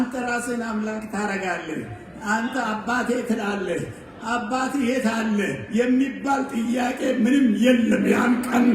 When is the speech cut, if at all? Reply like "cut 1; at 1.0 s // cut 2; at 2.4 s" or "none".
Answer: none

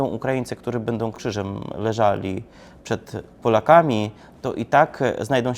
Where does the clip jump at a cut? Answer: cut 1; at 1.2 s

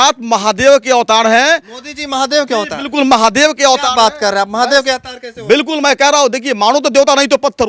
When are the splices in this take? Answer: none

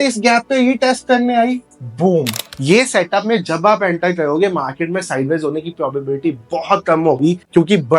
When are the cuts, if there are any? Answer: cut 1; at 2.4 s

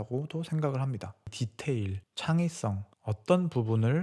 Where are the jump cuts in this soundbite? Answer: cut 1; at 1.4 s

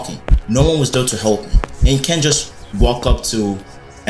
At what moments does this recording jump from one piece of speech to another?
none

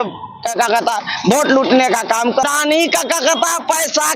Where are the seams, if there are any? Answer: cut 1; at 2.4 s

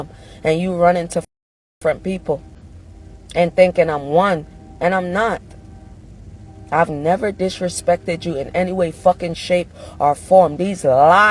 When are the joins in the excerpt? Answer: none

